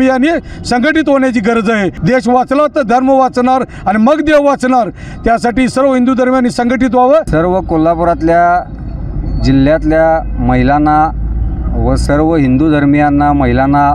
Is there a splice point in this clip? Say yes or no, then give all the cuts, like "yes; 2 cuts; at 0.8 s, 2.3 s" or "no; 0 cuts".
yes; 2 cuts; at 2.0 s, 7.3 s